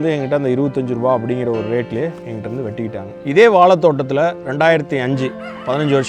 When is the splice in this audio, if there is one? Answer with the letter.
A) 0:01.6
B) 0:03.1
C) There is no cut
B